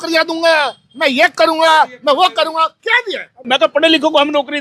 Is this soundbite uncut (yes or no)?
no